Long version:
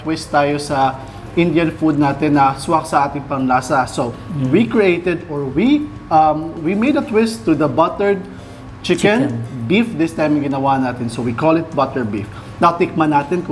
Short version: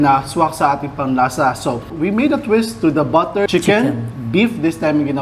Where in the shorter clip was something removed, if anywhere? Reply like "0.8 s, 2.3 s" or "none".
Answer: 1.9 s, 3.5 s